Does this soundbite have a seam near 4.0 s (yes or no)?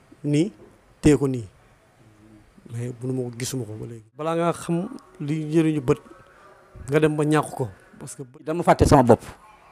yes